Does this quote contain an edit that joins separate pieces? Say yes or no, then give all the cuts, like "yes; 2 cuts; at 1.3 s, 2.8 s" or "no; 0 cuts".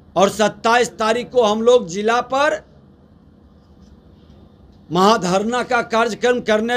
no; 0 cuts